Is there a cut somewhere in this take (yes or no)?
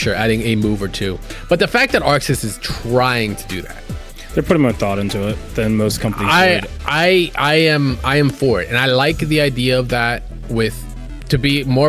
yes